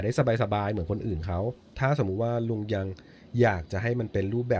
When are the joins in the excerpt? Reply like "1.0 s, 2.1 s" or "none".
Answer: 1.7 s